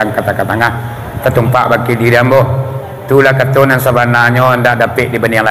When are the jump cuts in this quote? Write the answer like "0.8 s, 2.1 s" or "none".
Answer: none